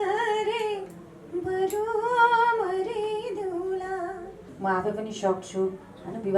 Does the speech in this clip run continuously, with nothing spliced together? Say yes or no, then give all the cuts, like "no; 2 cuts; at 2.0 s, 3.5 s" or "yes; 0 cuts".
no; 1 cut; at 4.4 s